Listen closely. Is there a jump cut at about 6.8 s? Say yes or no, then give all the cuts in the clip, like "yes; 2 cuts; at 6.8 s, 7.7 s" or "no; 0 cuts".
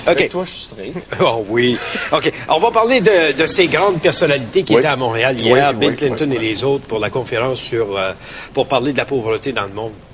yes; 1 cut; at 6.8 s